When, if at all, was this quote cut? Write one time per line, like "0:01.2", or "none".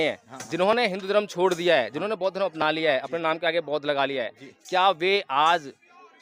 none